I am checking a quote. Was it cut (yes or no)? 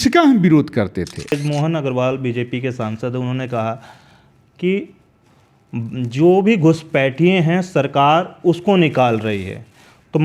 yes